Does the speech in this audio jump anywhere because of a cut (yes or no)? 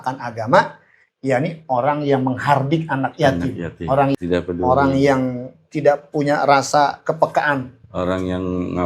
yes